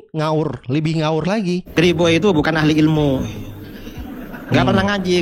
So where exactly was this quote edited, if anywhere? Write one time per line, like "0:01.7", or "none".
0:01.7

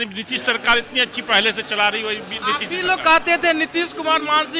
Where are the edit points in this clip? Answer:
none

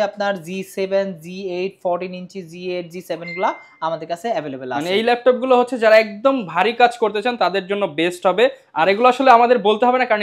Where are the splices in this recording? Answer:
none

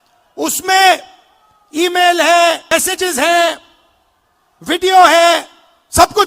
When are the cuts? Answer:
0:02.6

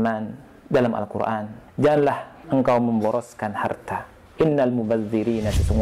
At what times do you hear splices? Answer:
0:01.6
0:02.3
0:04.2

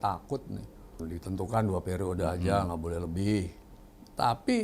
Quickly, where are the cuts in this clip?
0:00.9

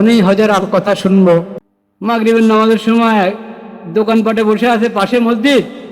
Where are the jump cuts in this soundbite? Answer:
0:01.5

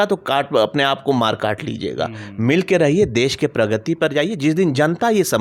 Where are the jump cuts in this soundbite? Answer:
none

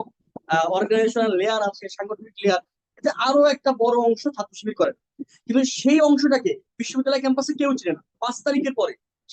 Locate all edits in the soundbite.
0:08.3

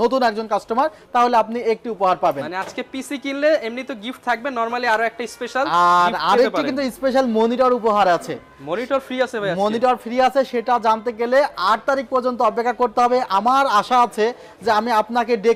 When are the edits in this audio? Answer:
none

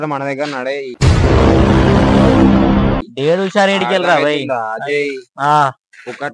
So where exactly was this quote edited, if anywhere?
none

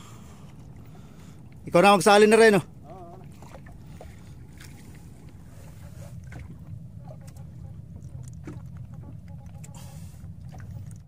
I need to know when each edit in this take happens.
none

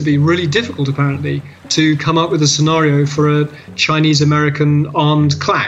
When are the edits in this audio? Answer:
none

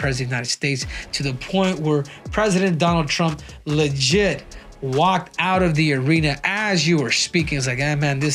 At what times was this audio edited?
none

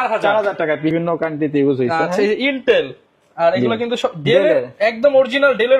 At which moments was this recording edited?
0:00.9

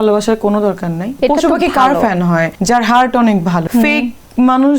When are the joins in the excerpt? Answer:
0:01.2
0:02.5
0:03.6

